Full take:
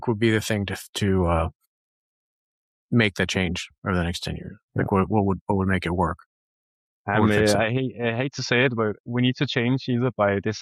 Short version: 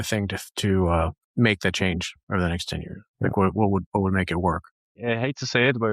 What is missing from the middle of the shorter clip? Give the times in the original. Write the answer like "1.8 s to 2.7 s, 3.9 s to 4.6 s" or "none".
1.6 s to 2.8 s, 6.5 s to 7.9 s